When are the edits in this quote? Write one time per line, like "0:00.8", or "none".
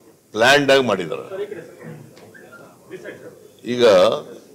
0:01.4